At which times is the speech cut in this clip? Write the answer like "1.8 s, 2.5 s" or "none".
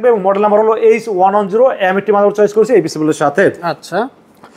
none